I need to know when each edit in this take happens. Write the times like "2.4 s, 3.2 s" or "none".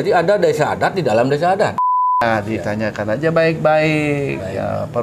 2.2 s